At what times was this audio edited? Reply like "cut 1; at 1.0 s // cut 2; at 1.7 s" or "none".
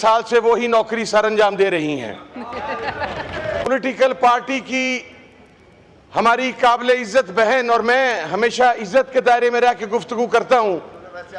cut 1; at 3.6 s